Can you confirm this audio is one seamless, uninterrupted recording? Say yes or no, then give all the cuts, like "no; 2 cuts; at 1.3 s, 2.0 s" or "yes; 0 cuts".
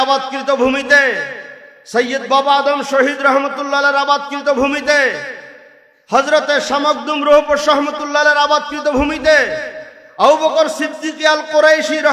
yes; 0 cuts